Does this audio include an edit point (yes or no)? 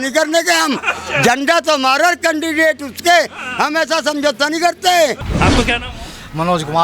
yes